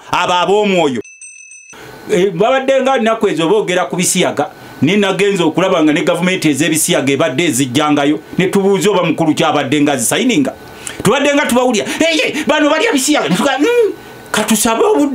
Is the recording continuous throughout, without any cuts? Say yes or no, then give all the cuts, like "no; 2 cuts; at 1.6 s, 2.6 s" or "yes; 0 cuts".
no; 1 cut; at 1.4 s